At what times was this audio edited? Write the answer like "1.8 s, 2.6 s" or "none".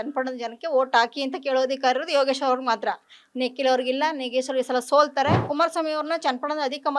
5.5 s